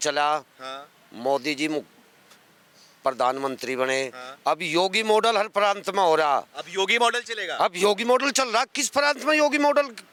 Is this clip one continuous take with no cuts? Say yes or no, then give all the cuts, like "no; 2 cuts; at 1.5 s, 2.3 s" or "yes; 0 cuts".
yes; 0 cuts